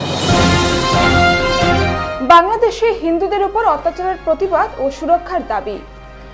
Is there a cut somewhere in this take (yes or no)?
yes